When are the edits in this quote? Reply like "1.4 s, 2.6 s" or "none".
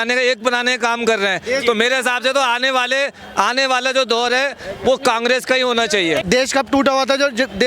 6.2 s